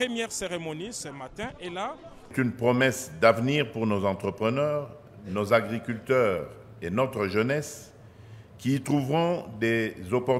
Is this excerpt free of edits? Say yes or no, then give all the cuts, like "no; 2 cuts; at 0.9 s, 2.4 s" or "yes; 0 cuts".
no; 1 cut; at 2.3 s